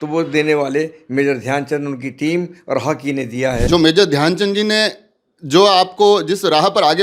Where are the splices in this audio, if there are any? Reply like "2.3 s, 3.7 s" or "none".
3.6 s